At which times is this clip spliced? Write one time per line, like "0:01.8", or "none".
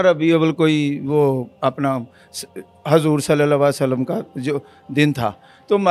none